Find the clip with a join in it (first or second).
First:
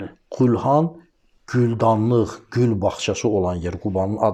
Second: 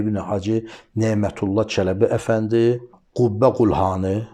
second